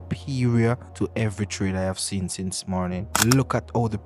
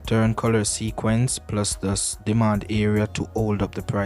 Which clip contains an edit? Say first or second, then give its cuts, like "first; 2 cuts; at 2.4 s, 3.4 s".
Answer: first; 2 cuts; at 1.0 s, 3.1 s